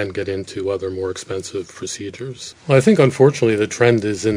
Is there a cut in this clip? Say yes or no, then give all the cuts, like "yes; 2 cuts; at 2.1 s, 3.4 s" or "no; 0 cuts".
yes; 1 cut; at 2.4 s